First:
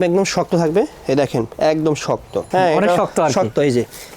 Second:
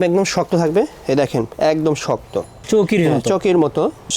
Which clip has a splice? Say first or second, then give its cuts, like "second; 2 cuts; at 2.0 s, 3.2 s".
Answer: first; 1 cut; at 2.4 s